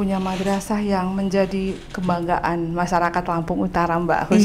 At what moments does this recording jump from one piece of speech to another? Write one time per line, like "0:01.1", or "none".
none